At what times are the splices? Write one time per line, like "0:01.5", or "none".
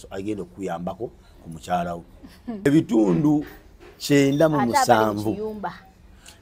0:02.6